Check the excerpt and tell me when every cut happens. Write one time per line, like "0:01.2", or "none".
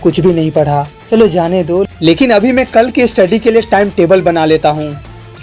none